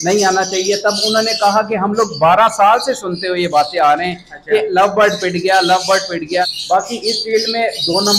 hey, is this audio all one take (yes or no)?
no